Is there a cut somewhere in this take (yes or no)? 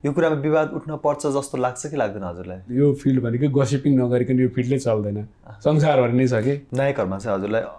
yes